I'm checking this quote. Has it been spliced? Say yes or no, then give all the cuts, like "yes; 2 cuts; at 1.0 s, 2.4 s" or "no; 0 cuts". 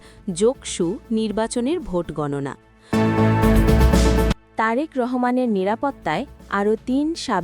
yes; 1 cut; at 2.7 s